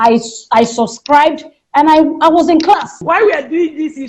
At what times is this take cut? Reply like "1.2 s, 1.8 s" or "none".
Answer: 3.0 s